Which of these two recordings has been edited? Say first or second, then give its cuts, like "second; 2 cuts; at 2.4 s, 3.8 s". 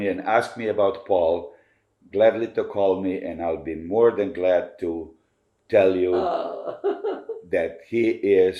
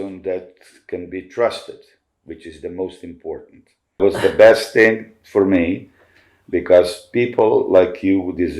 second; 1 cut; at 4.0 s